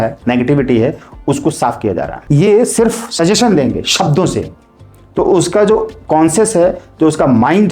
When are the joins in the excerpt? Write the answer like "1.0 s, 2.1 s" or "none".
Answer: 2.1 s